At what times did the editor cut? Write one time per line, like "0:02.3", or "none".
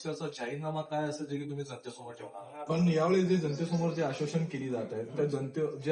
0:02.6

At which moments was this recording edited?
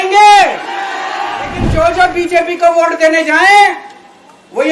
0:01.6

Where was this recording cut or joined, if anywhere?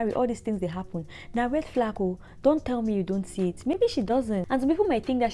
0:04.4

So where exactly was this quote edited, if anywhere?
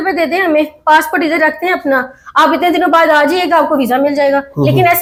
none

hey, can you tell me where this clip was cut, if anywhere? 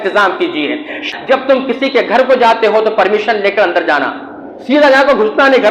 0:01.0

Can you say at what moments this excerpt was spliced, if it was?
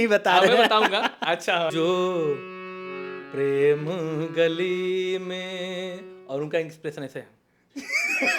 0:01.7

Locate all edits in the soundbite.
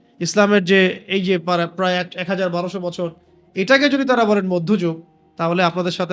none

